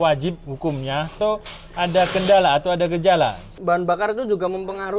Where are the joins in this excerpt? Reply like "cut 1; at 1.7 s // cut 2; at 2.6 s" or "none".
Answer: cut 1; at 1.2 s // cut 2; at 3.5 s